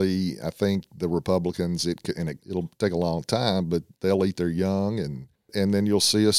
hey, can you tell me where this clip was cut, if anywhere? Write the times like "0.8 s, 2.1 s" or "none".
2.3 s, 3.9 s, 5.5 s